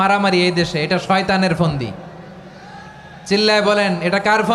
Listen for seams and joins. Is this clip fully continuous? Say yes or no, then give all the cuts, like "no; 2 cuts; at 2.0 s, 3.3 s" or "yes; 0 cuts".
yes; 0 cuts